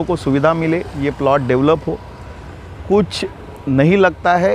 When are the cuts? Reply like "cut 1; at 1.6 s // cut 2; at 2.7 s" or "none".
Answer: none